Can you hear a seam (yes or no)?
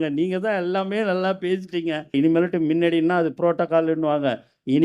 yes